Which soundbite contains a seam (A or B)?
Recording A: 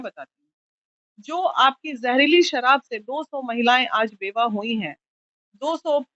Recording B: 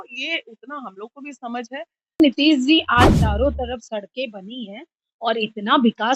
B